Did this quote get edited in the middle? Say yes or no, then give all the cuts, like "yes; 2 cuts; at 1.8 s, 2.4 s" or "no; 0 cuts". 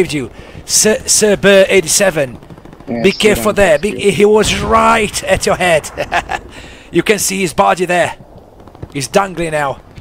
no; 0 cuts